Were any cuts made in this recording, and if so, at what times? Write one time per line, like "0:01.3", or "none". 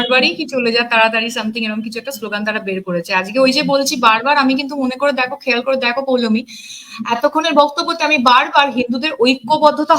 none